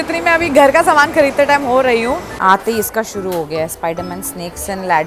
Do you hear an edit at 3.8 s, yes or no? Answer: no